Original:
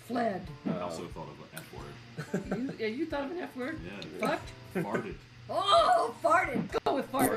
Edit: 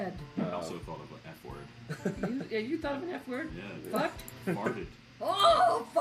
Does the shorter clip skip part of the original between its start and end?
no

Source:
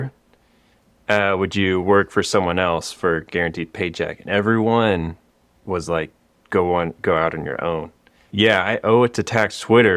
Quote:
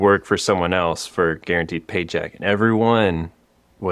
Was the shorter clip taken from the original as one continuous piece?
yes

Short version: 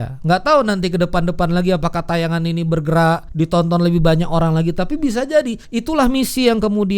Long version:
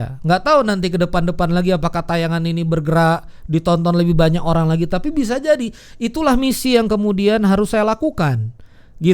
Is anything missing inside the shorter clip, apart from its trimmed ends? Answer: yes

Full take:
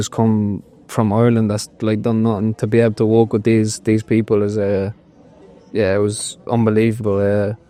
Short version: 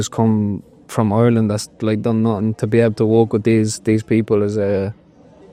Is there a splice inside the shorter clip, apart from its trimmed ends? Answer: no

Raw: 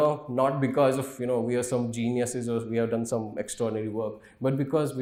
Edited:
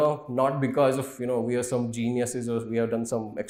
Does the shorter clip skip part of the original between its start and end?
no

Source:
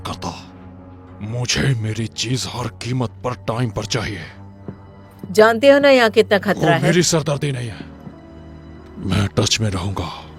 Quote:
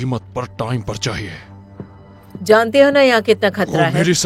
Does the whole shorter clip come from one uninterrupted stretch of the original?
yes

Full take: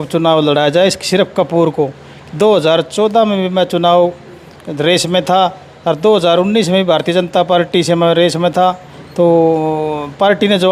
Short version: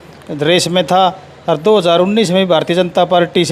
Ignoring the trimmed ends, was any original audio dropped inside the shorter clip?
no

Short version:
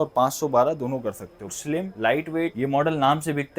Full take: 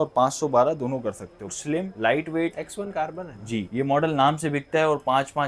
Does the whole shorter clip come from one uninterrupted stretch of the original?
no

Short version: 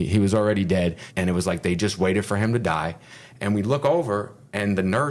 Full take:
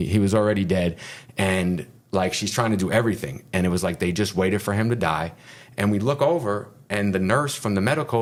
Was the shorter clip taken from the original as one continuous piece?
no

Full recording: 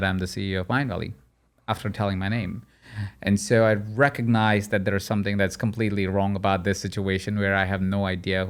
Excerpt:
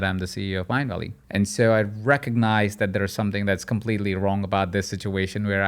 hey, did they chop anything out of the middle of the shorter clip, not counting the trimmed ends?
yes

